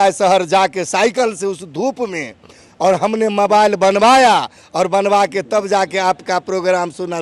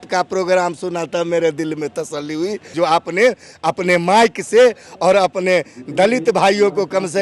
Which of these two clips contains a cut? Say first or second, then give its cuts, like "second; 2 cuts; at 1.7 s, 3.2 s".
second; 1 cut; at 2.7 s